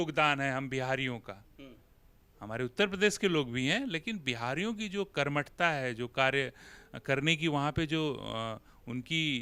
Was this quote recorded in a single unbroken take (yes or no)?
yes